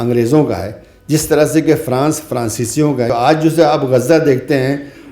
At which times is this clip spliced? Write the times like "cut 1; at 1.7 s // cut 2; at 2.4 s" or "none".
cut 1; at 3.1 s